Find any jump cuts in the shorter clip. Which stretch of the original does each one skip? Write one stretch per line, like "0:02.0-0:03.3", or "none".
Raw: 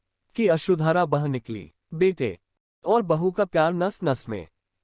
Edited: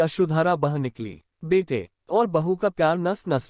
0:02.4-0:02.7